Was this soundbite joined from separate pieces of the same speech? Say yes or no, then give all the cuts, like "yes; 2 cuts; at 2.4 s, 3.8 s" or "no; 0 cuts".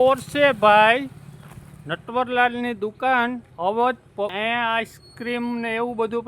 yes; 1 cut; at 4.3 s